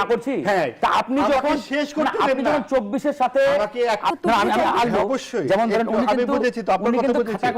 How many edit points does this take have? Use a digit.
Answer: 1